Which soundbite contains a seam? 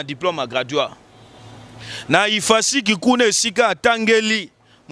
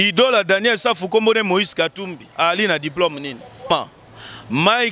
second; 1 cut; at 3.7 s

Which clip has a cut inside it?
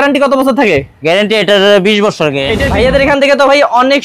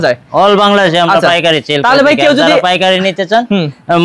first; 1 cut; at 2.5 s

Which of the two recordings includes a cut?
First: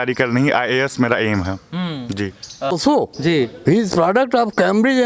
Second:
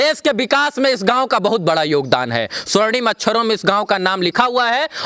first; 1 cut; at 2.7 s

